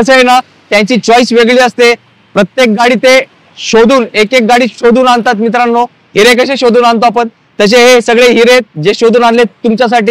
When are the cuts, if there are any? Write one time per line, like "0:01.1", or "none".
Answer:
none